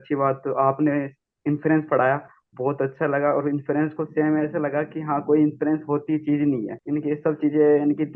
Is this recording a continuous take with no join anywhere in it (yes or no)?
yes